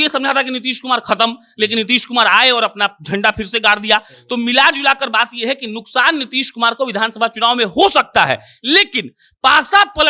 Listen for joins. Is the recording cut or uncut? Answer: uncut